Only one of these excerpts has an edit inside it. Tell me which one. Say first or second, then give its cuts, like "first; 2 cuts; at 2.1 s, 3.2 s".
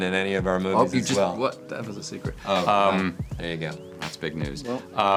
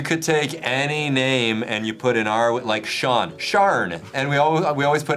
second; 1 cut; at 4.0 s